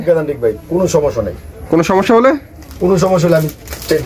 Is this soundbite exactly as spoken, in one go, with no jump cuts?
yes; 0 cuts

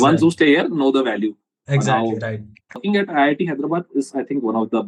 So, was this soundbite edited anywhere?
yes; 1 cut; at 2.8 s

